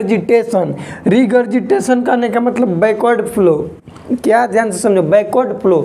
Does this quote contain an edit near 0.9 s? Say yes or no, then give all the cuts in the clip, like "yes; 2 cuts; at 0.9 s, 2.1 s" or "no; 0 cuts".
no; 0 cuts